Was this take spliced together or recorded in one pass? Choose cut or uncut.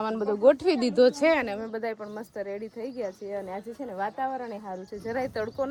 uncut